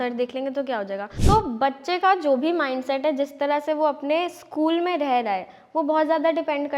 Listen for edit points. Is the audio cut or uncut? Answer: cut